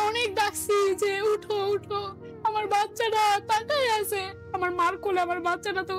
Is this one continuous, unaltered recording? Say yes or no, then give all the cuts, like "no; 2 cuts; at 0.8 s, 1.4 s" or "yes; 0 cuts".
yes; 0 cuts